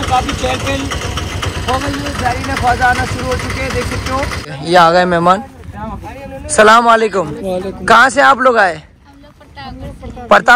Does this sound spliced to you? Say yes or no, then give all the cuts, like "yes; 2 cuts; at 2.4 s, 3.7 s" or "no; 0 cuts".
yes; 1 cut; at 4.5 s